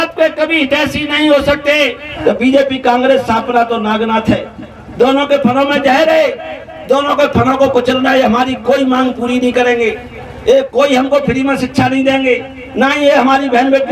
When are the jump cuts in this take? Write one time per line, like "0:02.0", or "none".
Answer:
0:02.0